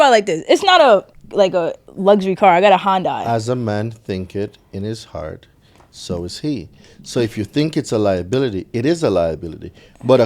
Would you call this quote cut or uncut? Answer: cut